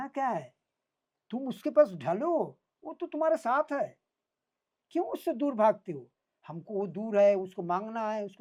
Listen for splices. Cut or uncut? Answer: uncut